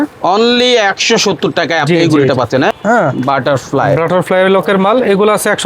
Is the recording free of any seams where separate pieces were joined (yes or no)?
no